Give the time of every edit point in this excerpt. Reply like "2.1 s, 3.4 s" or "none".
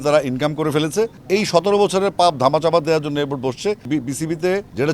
1.1 s, 3.8 s